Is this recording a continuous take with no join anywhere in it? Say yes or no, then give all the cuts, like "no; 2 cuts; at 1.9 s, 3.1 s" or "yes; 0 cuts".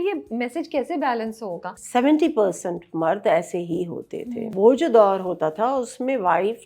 no; 2 cuts; at 1.7 s, 4.5 s